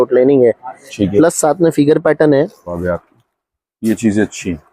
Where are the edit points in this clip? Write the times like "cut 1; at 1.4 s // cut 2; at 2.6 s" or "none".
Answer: cut 1; at 2.7 s

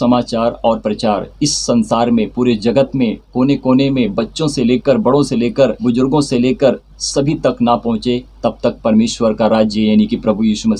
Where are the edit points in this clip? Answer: cut 1; at 5.8 s

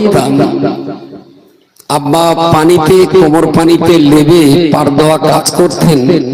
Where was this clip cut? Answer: none

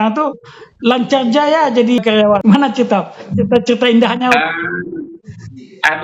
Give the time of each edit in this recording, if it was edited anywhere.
cut 1; at 2.1 s

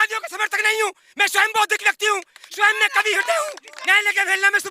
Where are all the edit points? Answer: cut 1; at 3.7 s

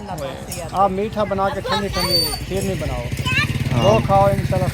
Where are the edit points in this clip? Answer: none

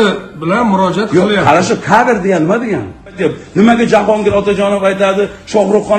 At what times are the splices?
cut 1; at 3.2 s

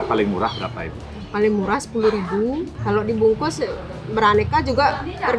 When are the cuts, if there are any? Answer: cut 1; at 2.7 s

